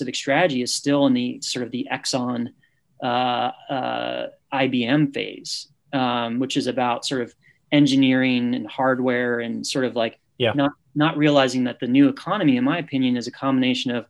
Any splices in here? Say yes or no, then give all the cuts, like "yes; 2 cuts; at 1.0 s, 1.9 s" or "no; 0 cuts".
no; 0 cuts